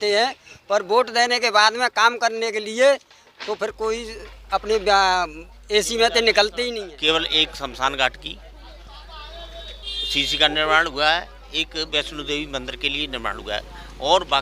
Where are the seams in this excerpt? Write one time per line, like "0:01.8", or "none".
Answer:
0:06.7